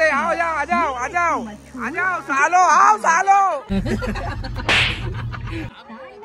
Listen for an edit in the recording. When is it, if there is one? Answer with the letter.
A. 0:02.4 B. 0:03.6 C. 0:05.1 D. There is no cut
D